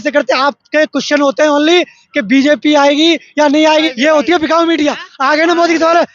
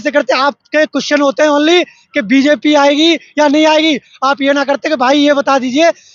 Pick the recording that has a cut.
first; 1 cut; at 3.9 s

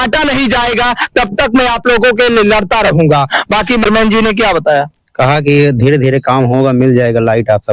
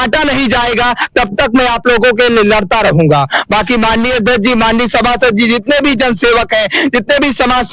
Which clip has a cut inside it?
first; 1 cut; at 3.8 s

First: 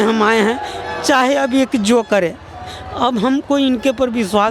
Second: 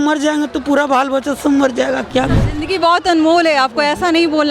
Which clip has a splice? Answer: second; 1 cut; at 2.5 s

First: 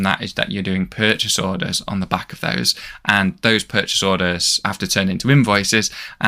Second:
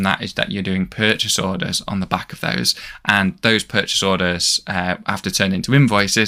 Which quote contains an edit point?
first; 1 cut; at 4.6 s

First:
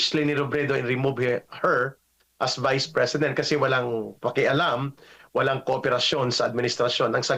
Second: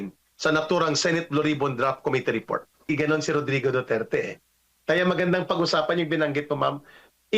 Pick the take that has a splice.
second; 1 cut; at 2.9 s

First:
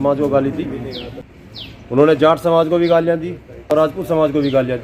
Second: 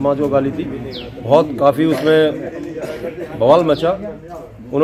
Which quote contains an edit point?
first; 2 cuts; at 1.1 s, 3.7 s

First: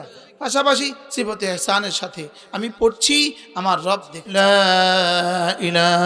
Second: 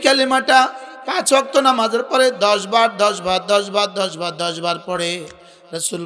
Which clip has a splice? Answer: first; 1 cut; at 4.1 s

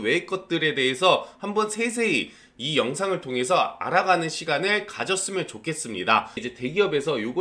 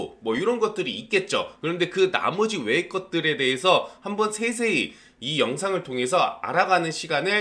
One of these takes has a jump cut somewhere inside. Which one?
first; 1 cut; at 6.4 s

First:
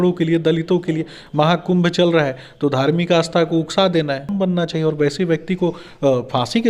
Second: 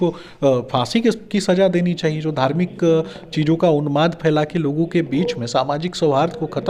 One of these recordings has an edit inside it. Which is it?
first; 1 cut; at 4.3 s

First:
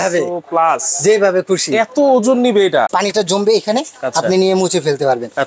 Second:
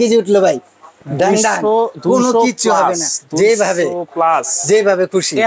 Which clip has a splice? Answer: first; 1 cut; at 2.9 s

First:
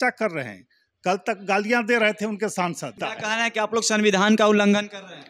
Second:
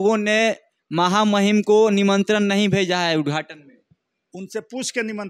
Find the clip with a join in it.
first; 1 cut; at 3.0 s

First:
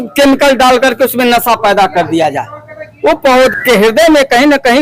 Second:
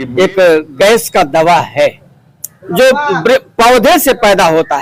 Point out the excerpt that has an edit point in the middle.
first; 1 cut; at 3.5 s

